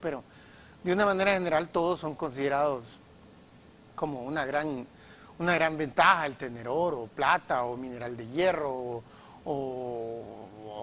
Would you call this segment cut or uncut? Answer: cut